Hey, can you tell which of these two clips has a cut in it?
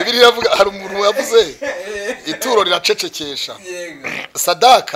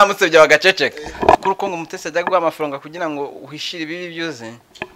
second; 1 cut; at 1.4 s

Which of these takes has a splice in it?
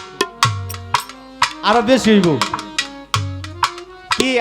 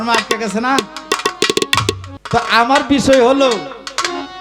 second; 1 cut; at 2.1 s

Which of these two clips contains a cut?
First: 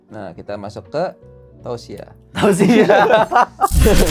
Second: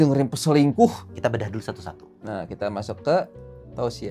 second; 1 cut; at 1.1 s

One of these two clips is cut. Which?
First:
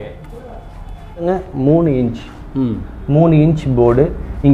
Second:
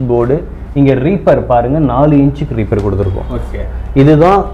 first; 1 cut; at 1.3 s

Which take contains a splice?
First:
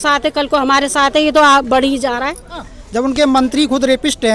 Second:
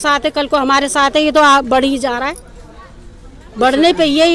first; 1 cut; at 2.8 s

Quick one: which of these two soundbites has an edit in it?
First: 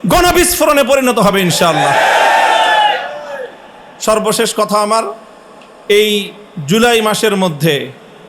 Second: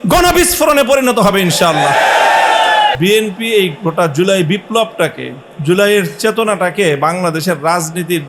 second; 1 cut; at 3.0 s

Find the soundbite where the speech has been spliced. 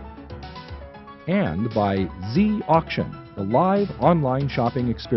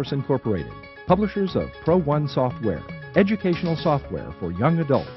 first; 1 cut; at 1.2 s

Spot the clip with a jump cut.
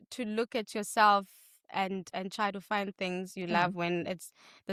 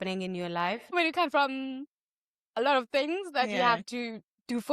second; 1 cut; at 0.9 s

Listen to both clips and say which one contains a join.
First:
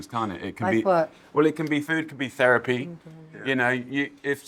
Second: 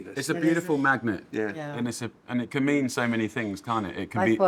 first; 1 cut; at 1.9 s

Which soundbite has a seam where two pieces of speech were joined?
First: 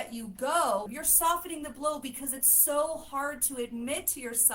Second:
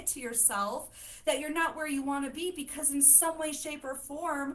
first; 1 cut; at 1.0 s

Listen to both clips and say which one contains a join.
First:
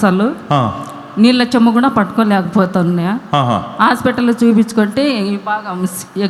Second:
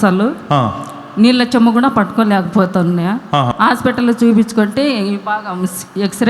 second; 1 cut; at 3.5 s

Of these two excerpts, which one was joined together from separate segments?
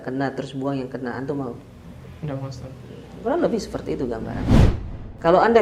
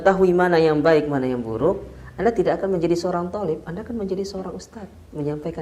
first; 1 cut; at 4.7 s

